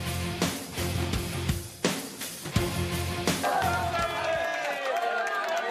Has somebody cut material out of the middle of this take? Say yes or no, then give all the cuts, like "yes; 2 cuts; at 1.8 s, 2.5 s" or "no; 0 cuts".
yes; 1 cut; at 3.4 s